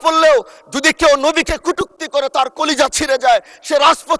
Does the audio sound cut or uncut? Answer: uncut